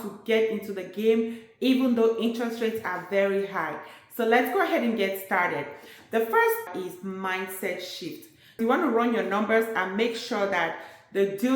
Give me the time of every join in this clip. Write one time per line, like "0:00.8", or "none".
0:06.7
0:08.7